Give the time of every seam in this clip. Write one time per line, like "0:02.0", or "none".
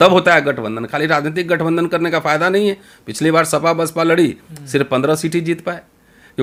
none